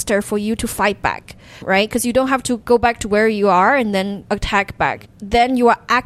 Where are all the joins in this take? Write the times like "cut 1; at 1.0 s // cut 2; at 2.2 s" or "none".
cut 1; at 1.6 s // cut 2; at 2.6 s // cut 3; at 4.2 s // cut 4; at 5.1 s